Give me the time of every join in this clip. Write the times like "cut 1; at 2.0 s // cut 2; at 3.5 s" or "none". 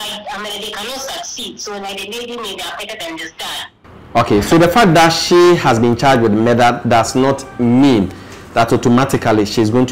none